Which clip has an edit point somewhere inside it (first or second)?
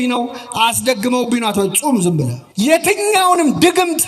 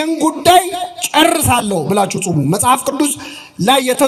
first